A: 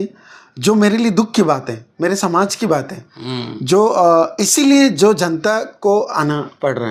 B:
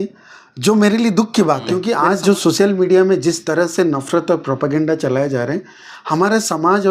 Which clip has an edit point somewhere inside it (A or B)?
B